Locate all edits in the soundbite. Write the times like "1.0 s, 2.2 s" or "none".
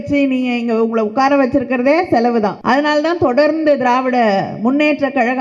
2.6 s